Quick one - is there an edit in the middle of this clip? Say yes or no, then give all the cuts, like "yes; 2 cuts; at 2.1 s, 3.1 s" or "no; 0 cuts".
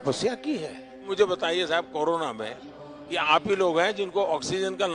yes; 1 cut; at 1.1 s